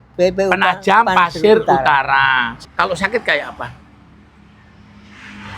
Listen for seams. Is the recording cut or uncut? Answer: cut